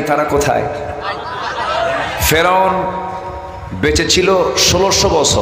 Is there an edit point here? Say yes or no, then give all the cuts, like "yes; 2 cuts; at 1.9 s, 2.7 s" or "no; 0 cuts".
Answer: yes; 1 cut; at 2.2 s